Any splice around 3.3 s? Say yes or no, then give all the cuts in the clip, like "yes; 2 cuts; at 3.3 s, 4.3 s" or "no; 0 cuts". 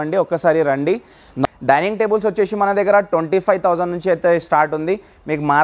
no; 1 cut; at 1.4 s